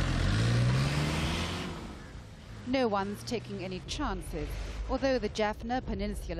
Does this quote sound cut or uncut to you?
cut